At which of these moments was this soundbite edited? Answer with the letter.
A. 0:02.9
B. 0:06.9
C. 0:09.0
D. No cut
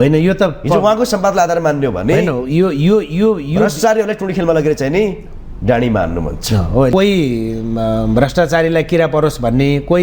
B